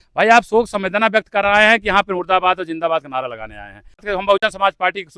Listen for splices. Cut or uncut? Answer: cut